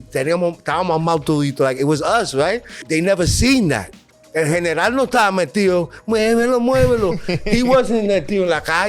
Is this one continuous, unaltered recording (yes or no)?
no